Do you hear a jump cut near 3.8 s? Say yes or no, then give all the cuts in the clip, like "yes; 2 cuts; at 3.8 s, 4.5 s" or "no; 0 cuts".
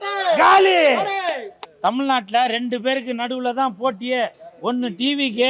no; 1 cut; at 1.6 s